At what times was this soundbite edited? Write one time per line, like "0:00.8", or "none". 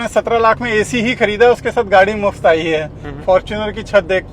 0:03.0